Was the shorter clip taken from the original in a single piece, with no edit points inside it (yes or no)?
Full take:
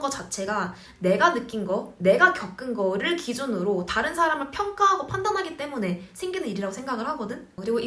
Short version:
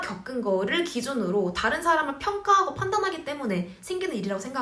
yes